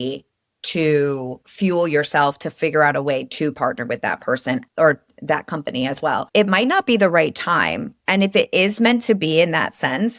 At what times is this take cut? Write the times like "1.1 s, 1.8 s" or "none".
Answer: 6.2 s